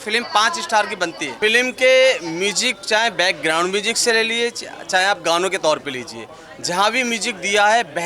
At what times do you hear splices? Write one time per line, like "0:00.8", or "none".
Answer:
none

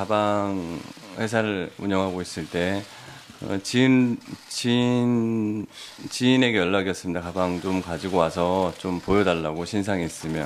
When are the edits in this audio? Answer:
none

